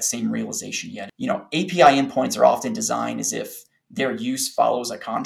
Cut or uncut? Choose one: cut